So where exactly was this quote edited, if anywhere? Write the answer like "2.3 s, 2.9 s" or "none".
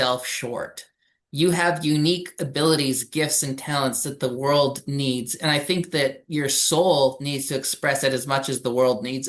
none